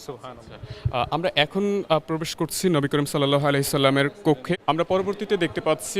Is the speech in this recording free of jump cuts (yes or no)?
no